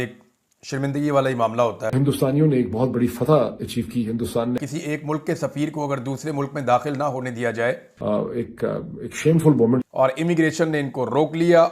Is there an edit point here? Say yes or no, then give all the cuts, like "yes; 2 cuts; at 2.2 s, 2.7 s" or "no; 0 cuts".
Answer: yes; 3 cuts; at 1.9 s, 4.7 s, 9.8 s